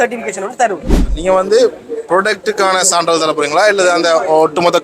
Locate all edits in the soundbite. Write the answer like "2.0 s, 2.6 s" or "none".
1.1 s

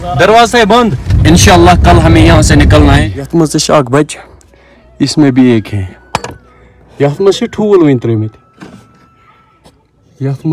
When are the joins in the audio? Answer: 3.0 s

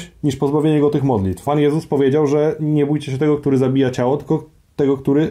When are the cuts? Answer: 1.5 s

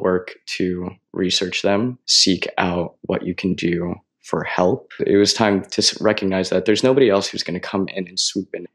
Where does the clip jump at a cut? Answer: 2.1 s, 5.0 s

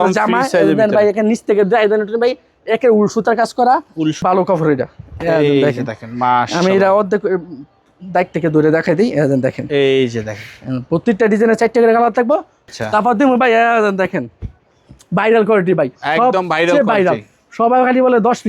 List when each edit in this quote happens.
4.2 s, 12.6 s

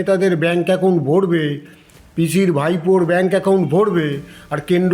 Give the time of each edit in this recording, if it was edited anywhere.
none

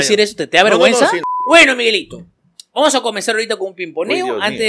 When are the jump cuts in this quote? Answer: 1.3 s

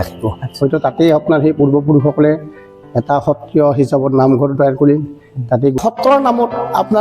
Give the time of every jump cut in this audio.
5.8 s

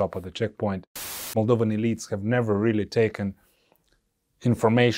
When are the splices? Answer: 1.2 s

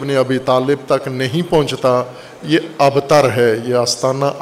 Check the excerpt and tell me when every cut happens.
none

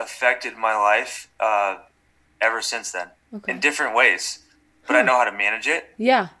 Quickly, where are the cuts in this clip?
none

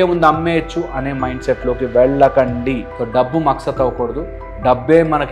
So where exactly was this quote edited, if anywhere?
2.9 s

